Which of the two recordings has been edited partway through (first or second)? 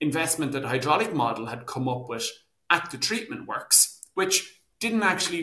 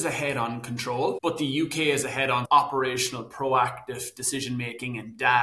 second